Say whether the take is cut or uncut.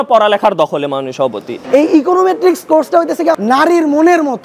cut